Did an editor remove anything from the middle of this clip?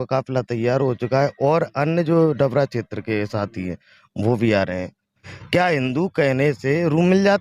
yes; 1 cut; at 5.3 s

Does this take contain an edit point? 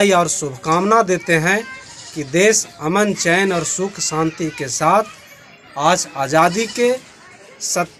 no; 0 cuts

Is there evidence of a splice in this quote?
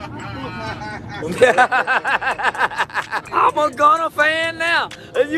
yes; 1 cut; at 3.2 s

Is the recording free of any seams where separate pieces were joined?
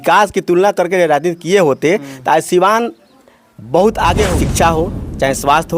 no; 1 cut; at 4.3 s

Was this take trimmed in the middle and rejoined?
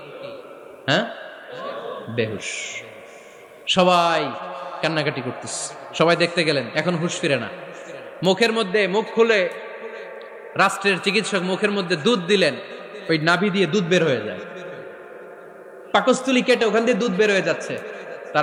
no; 0 cuts

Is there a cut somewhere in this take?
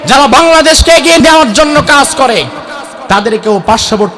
yes; 1 cut; at 1.2 s

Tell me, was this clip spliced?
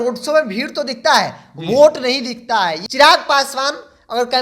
yes; 1 cut; at 2.8 s

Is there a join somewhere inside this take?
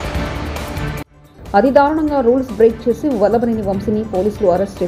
yes; 1 cut; at 1.0 s

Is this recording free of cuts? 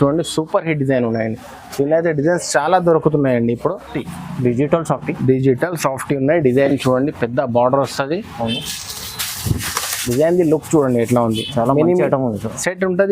no; 1 cut; at 3.9 s

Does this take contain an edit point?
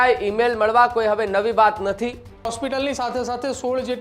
yes; 1 cut; at 2.5 s

